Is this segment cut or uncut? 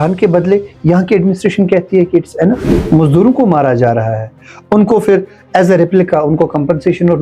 cut